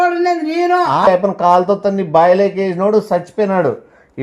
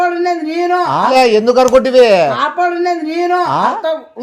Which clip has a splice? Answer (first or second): first